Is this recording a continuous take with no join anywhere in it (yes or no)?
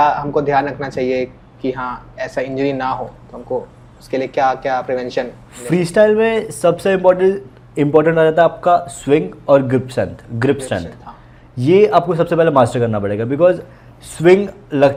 yes